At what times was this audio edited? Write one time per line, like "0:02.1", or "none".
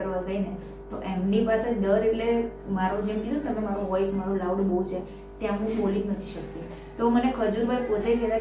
none